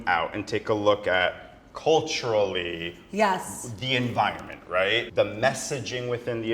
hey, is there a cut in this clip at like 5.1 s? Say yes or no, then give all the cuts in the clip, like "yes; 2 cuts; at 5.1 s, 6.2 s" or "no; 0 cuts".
yes; 1 cut; at 5.1 s